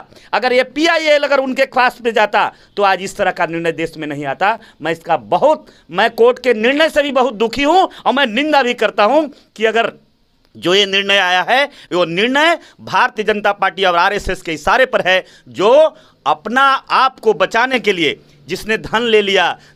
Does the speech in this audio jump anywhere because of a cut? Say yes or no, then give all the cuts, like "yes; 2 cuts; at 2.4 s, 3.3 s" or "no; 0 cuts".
no; 0 cuts